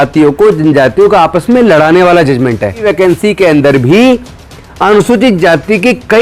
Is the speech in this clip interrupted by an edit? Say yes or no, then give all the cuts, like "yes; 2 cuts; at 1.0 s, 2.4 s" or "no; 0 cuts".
yes; 1 cut; at 2.8 s